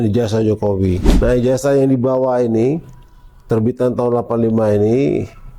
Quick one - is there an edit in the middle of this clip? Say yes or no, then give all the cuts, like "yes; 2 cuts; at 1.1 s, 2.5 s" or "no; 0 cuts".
yes; 1 cut; at 1.1 s